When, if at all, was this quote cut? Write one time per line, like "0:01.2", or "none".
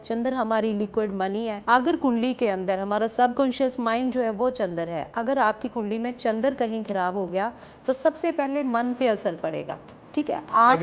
0:01.6